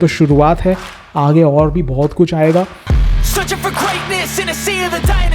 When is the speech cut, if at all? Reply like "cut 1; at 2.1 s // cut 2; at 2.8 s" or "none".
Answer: none